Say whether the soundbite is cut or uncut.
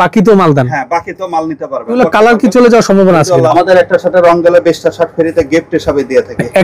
cut